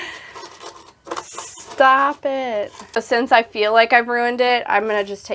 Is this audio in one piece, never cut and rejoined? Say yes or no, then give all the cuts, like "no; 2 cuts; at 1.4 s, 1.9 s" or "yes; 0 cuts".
no; 1 cut; at 3.0 s